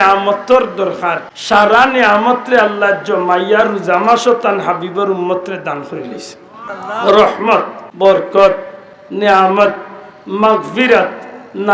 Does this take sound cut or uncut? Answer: cut